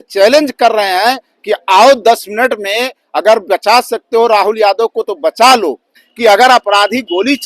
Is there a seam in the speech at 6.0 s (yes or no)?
yes